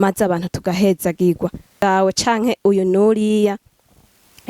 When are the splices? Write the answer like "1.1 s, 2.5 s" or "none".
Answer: 1.8 s